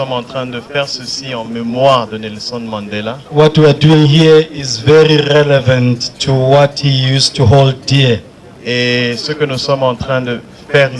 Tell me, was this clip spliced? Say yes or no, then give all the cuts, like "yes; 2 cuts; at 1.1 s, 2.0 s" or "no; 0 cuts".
no; 0 cuts